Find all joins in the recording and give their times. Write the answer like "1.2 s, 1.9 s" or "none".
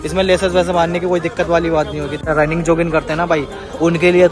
2.3 s